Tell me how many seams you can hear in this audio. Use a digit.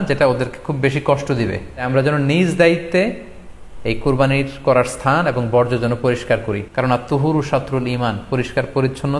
2